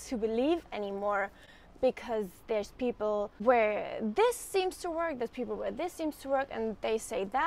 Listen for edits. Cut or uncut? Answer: cut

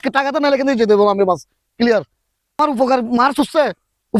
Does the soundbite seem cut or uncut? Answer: cut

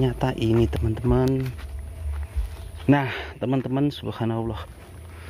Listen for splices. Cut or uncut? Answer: uncut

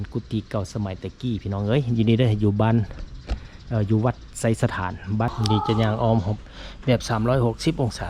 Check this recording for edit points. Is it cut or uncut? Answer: cut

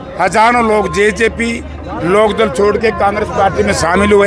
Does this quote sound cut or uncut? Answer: uncut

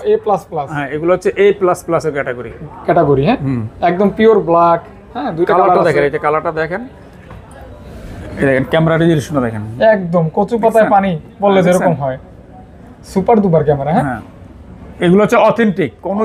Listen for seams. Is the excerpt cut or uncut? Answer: uncut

